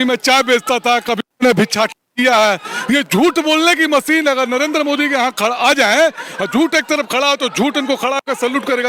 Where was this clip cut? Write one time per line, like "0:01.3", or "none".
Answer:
none